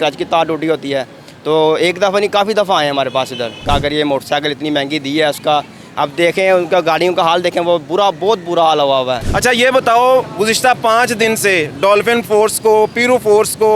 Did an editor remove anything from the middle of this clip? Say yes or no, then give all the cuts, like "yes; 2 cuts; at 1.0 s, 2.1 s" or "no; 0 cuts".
yes; 2 cuts; at 3.6 s, 9.3 s